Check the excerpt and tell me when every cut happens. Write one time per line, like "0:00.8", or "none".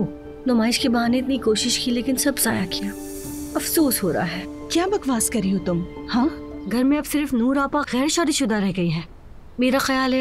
0:06.5